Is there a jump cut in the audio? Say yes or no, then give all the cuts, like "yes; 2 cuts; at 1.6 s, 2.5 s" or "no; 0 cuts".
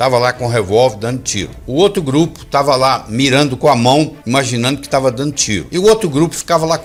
no; 0 cuts